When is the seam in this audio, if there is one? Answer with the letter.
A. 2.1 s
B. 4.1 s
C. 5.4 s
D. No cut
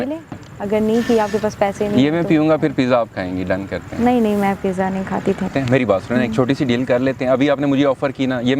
C